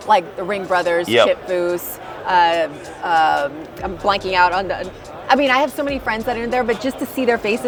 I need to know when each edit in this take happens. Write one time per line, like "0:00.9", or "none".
none